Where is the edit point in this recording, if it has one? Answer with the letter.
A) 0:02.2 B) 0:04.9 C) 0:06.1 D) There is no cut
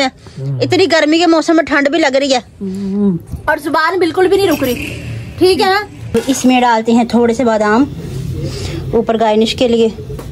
C